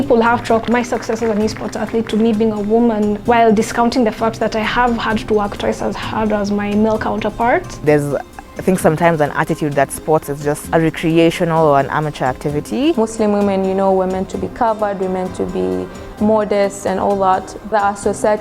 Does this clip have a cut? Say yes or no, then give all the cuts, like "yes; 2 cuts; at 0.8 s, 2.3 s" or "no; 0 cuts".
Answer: yes; 3 cuts; at 7.8 s, 10.6 s, 12.9 s